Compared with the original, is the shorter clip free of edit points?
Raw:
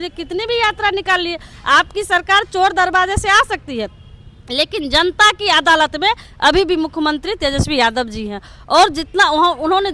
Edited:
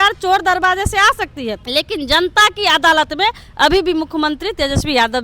no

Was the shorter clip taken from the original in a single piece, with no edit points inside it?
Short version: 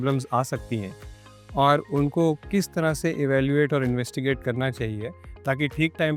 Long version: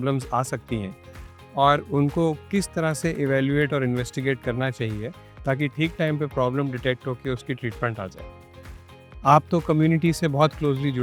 yes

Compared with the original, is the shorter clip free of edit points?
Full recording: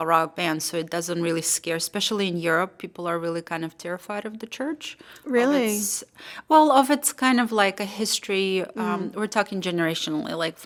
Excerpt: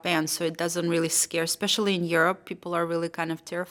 yes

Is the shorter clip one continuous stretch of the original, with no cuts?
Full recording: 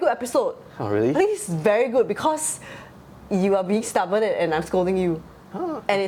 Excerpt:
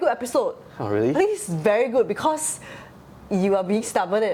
yes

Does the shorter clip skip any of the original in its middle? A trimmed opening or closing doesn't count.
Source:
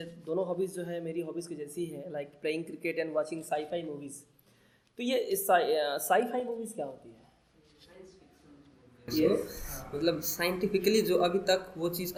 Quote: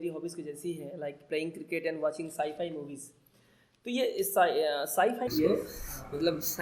yes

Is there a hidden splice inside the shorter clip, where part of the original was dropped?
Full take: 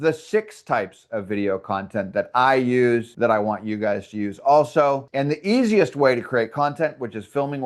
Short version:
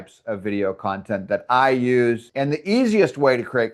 yes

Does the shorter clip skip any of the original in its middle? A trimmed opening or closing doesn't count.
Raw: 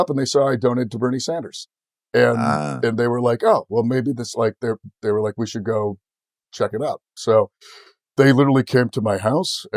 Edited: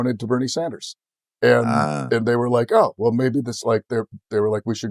no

